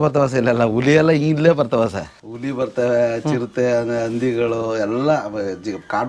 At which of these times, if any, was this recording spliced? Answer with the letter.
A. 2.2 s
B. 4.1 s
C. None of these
A